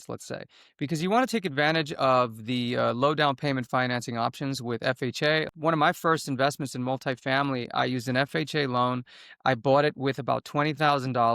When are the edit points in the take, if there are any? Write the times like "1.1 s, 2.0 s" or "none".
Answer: 5.5 s

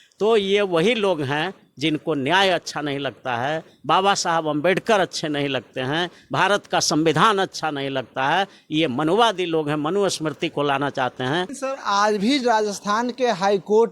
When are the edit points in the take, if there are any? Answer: 11.5 s

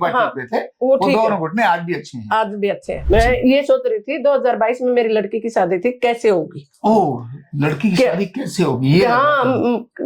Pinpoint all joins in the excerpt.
3.0 s

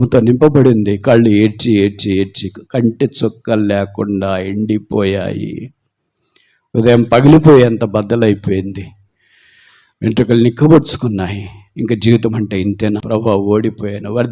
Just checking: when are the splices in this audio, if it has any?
13.0 s

